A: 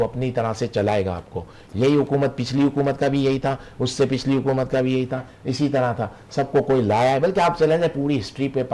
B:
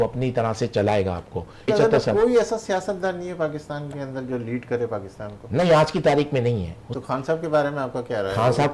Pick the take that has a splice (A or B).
B